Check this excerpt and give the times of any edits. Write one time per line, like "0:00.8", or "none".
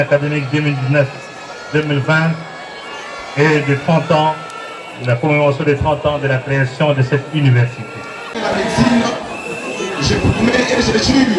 0:08.4

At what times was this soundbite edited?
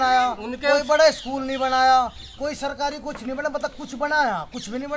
none

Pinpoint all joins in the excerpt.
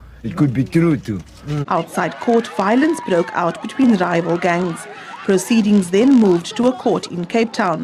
0:01.5

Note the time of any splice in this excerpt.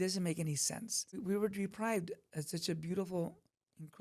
0:01.2

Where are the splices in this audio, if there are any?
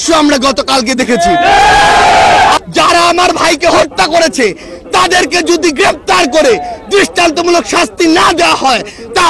0:02.6

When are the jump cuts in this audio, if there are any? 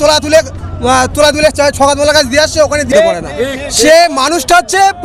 0:02.9

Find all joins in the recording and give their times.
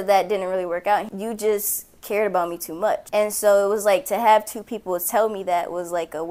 0:01.1
0:03.0

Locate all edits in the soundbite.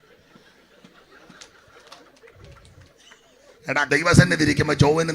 0:03.9

